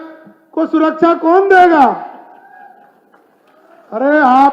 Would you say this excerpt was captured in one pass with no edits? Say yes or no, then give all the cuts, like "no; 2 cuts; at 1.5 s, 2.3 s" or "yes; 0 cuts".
yes; 0 cuts